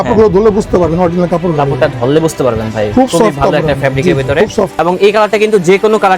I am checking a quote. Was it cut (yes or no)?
yes